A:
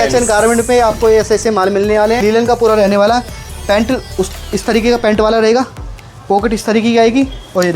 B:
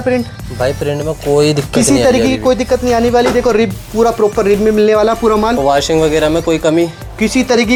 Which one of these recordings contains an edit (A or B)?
A